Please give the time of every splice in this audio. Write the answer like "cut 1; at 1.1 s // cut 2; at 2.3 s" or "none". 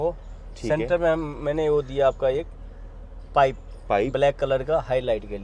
none